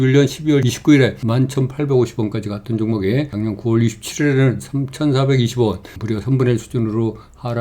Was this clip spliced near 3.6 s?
no; 1 cut; at 5.9 s

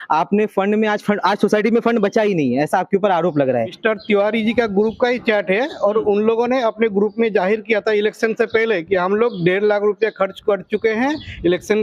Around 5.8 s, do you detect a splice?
no; 1 cut; at 3.8 s

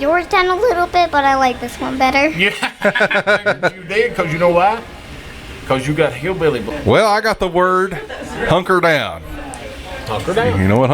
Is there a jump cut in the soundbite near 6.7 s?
yes; 1 cut; at 6.7 s

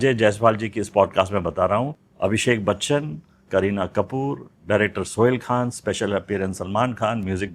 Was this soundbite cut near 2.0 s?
yes; 1 cut; at 2.0 s

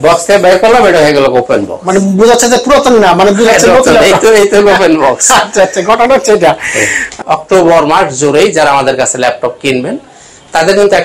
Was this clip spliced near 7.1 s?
yes; 1 cut; at 7.1 s

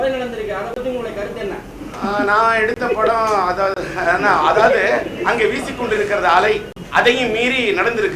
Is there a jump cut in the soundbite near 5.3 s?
no; 2 cuts; at 1.8 s, 6.8 s

